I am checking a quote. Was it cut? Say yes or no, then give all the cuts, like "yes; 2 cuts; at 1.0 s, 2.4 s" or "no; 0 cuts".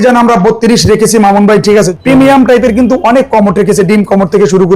yes; 1 cut; at 1.9 s